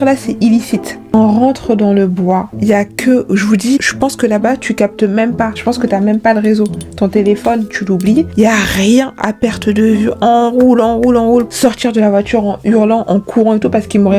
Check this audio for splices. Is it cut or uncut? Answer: cut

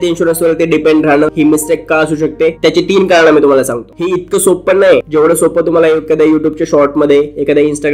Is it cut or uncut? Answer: cut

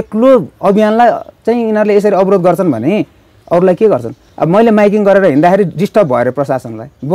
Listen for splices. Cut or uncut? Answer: cut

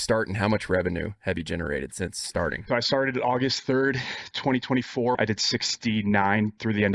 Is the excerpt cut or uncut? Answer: cut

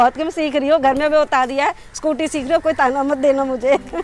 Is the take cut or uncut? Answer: uncut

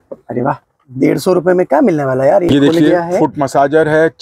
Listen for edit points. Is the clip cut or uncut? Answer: cut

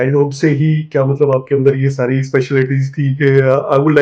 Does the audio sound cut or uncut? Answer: uncut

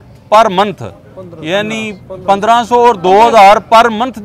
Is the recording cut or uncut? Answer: uncut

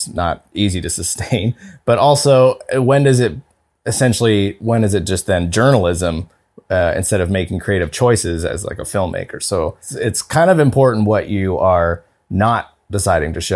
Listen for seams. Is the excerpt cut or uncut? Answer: cut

